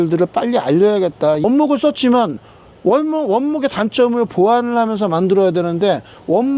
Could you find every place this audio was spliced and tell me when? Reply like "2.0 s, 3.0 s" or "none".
1.4 s